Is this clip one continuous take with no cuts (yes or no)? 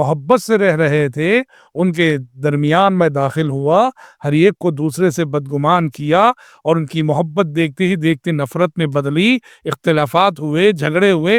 yes